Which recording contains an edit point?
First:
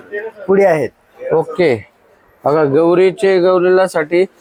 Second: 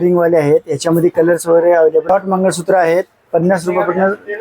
second; 1 cut; at 2.1 s

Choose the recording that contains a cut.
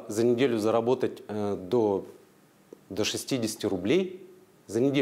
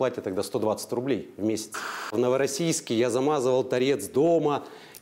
second; 1 cut; at 2.1 s

